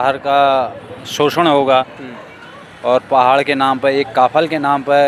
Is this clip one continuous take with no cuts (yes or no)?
yes